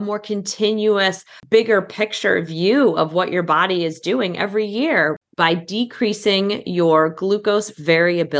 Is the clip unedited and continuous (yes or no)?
no